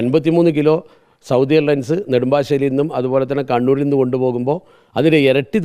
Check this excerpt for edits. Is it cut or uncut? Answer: uncut